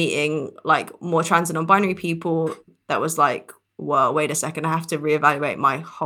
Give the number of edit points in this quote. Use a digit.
1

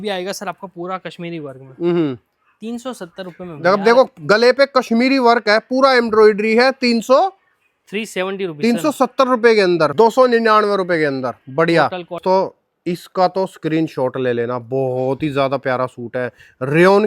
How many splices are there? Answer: 2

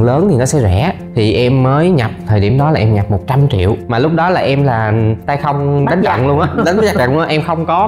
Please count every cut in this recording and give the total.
0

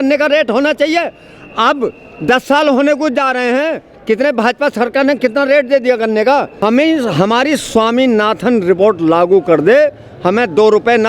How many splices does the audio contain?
1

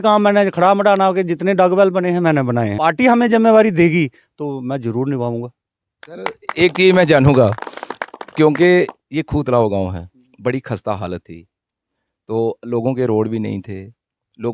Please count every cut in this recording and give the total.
1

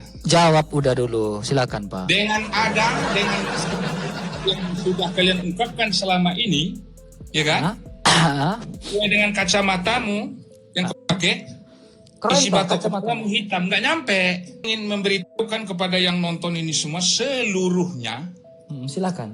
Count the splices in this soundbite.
1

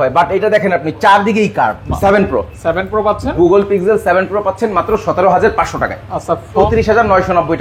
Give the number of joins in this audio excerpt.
2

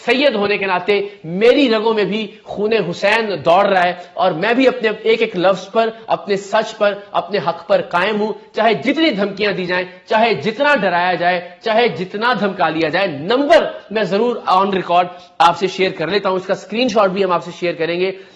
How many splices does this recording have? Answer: 0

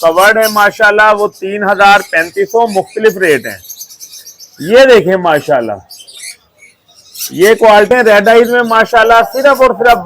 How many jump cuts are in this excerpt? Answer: 1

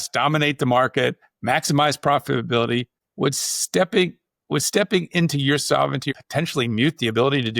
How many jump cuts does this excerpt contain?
1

